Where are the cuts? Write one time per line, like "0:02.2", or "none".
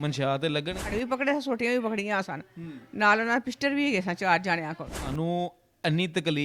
0:00.9
0:05.1